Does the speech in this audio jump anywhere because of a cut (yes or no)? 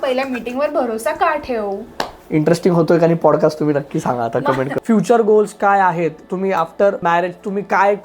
yes